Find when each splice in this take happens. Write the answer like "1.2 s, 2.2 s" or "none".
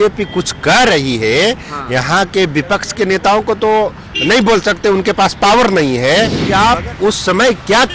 6.4 s